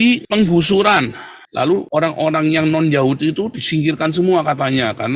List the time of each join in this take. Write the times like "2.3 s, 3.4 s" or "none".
1.3 s